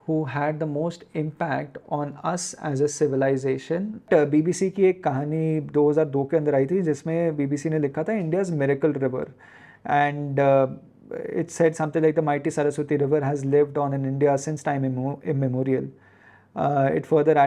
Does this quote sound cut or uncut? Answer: cut